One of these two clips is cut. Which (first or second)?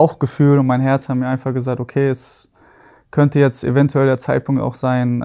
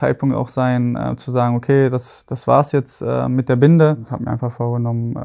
second